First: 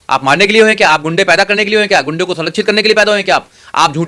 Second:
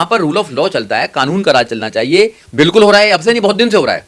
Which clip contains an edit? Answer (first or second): second